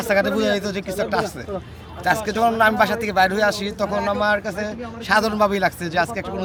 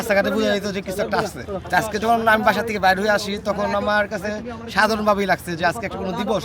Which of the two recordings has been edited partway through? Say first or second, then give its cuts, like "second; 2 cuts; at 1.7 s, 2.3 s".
second; 1 cut; at 1.5 s